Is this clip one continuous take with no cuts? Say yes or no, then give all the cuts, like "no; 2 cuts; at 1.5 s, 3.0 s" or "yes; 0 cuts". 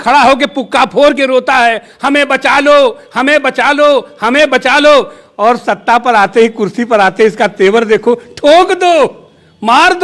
yes; 0 cuts